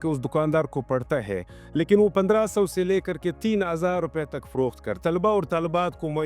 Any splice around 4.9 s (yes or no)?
yes